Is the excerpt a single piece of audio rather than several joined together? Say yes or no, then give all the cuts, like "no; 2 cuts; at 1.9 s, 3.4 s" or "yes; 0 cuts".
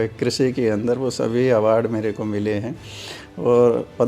yes; 0 cuts